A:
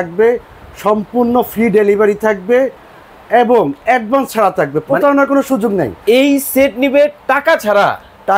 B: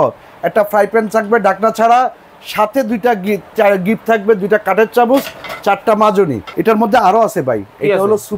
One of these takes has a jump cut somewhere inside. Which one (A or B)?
B